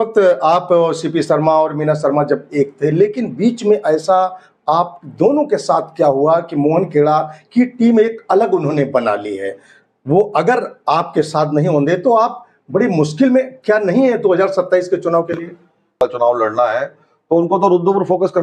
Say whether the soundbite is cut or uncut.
cut